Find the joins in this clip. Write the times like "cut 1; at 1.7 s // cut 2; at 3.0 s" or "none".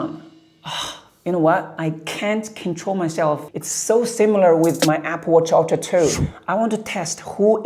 cut 1; at 1.7 s // cut 2; at 3.5 s

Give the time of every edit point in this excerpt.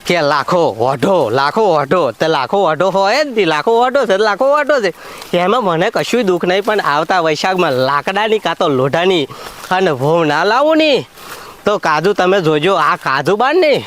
none

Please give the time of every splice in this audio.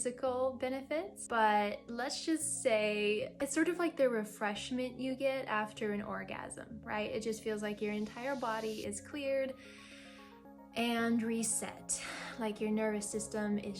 cut 1; at 1.2 s // cut 2; at 3.4 s

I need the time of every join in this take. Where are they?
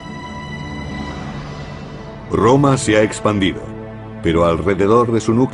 none

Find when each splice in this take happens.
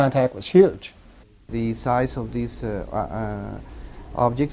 cut 1; at 1.4 s

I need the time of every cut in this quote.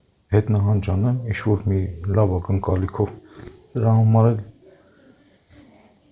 none

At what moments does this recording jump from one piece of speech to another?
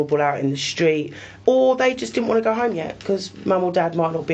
cut 1; at 1.3 s

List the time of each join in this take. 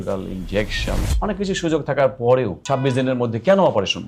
cut 1; at 2.6 s

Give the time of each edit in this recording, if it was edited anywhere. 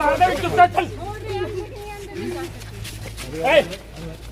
none

